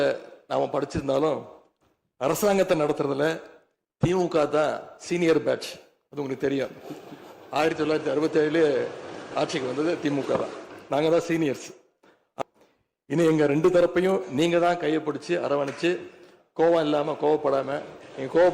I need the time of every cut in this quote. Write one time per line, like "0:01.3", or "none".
0:12.3